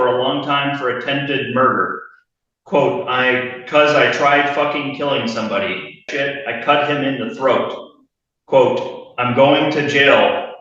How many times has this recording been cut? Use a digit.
1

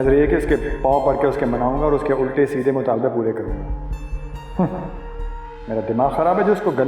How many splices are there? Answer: 0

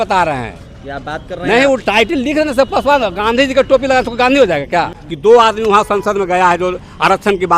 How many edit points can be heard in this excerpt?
1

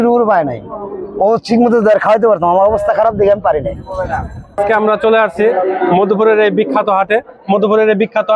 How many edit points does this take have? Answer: 1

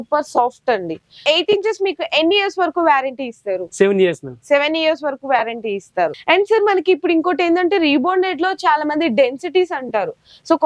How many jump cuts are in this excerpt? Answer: 2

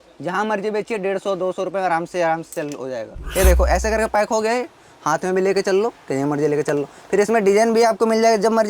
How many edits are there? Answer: 1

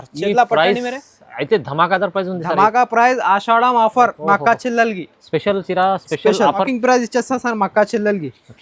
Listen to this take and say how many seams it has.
1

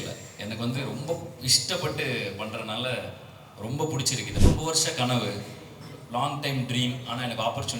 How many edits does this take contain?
1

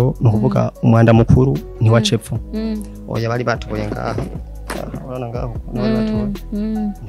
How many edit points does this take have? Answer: 0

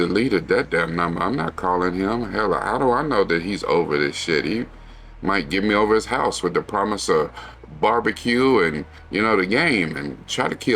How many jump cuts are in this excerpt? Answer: 0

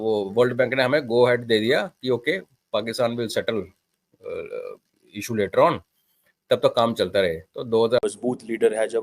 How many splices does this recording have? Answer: 1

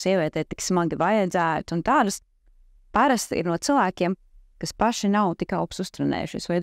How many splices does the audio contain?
0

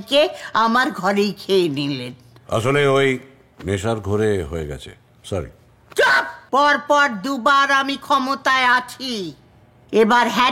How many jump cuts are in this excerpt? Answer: 1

